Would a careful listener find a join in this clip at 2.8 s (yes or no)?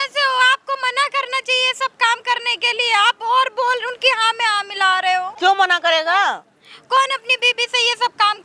no